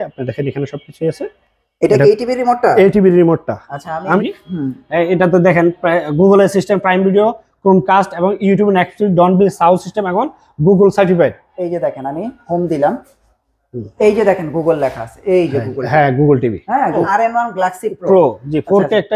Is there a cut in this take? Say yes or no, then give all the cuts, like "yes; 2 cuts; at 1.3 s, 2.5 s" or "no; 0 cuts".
yes; 3 cuts; at 4.2 s, 11.5 s, 17.0 s